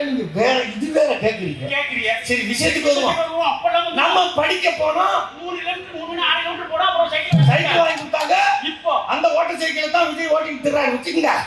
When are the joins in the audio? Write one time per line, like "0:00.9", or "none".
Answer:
none